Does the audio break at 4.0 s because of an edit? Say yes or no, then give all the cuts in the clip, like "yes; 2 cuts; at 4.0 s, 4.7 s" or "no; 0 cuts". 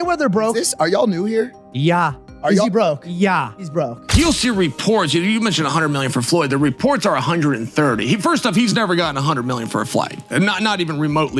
yes; 1 cut; at 4.0 s